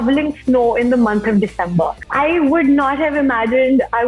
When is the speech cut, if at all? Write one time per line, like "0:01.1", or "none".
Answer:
0:02.0